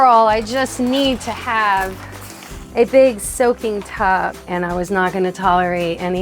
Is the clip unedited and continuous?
no; 1 cut; at 4.4 s

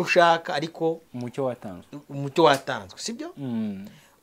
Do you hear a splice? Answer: no; 0 cuts

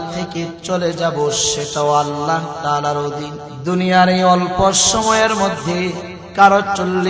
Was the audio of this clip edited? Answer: yes; 2 cuts; at 3.4 s, 6.2 s

